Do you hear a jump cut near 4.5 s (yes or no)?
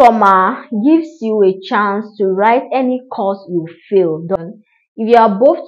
yes